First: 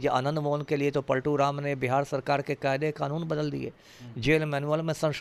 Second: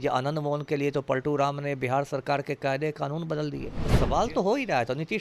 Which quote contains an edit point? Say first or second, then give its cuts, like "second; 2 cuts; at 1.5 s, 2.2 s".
second; 1 cut; at 3.8 s